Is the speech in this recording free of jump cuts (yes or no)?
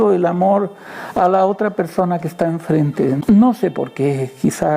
no